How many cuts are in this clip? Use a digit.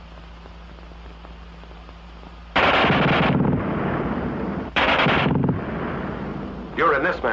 1